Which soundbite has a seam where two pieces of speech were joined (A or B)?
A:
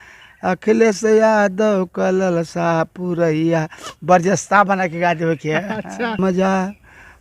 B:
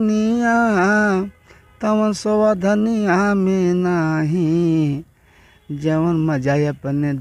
A